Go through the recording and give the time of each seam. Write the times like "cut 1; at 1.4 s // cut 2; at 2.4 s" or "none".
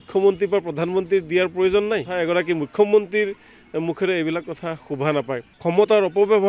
cut 1; at 2.1 s // cut 2; at 5.5 s